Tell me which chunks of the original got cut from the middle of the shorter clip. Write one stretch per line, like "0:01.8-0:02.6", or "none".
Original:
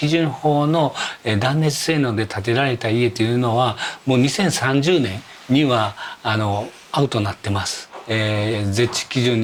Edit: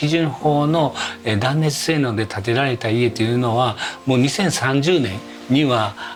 none